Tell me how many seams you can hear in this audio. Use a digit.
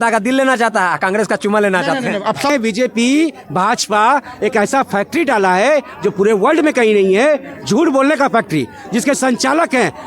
1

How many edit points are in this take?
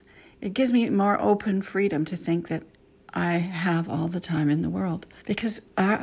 1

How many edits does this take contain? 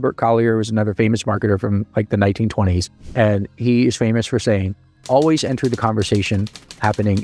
0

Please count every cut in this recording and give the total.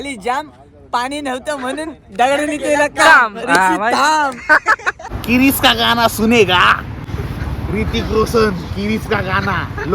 2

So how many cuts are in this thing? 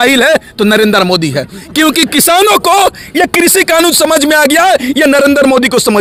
0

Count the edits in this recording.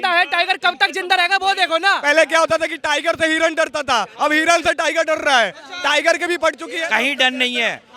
2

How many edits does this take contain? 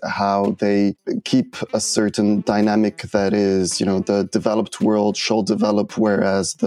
1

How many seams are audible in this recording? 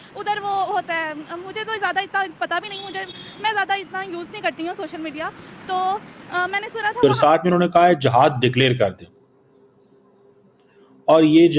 1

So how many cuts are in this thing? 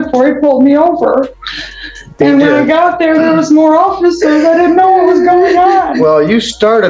1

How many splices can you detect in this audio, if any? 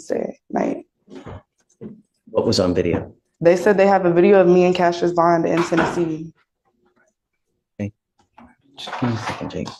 0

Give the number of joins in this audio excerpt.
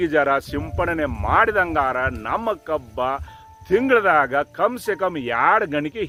0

